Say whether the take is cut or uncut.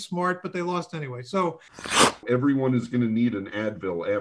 cut